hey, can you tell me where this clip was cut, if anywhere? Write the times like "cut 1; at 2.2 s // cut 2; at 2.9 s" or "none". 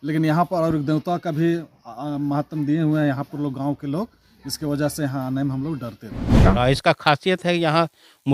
cut 1; at 6.4 s